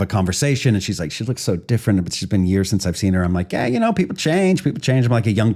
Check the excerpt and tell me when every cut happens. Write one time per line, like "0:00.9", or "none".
none